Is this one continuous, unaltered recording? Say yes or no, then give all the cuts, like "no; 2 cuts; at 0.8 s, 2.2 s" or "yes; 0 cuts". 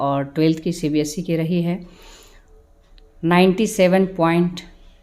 yes; 0 cuts